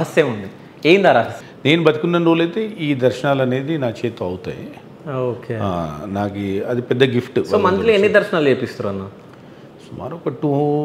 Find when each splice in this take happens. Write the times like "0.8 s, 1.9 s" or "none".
1.4 s

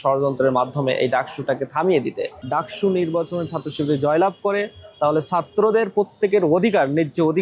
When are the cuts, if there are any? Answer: 2.3 s

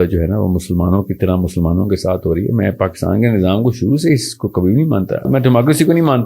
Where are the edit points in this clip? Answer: 5.3 s

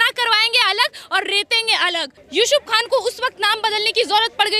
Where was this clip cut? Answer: 2.2 s

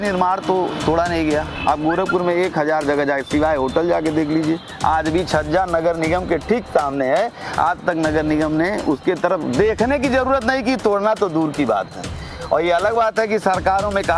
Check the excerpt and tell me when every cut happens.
none

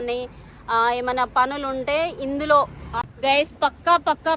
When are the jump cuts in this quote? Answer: 2.9 s

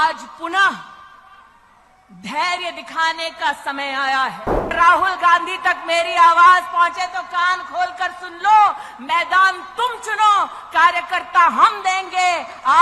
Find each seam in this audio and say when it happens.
4.7 s

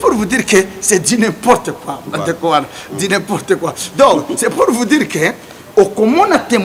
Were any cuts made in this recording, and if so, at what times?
none

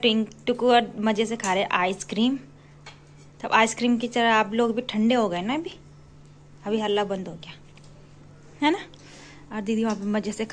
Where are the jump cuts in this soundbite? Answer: none

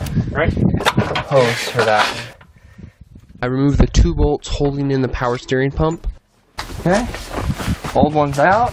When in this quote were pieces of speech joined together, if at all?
none

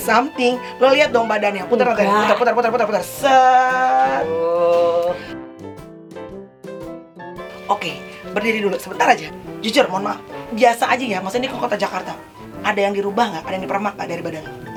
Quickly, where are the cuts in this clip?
none

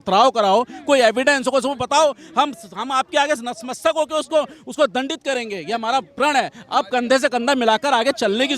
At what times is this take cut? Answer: none

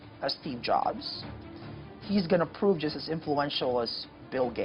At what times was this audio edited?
none

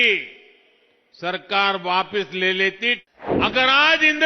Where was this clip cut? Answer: 3.0 s

